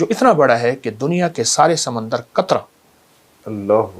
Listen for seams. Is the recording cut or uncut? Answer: uncut